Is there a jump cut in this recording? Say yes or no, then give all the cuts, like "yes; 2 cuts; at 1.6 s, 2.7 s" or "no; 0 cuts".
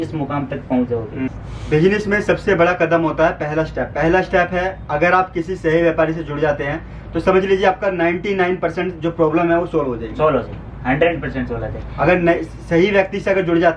yes; 1 cut; at 1.3 s